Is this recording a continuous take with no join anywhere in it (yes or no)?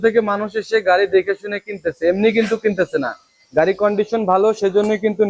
yes